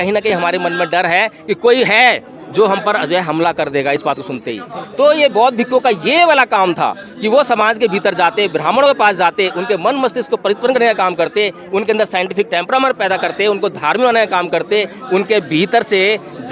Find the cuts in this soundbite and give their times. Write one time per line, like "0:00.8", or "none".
none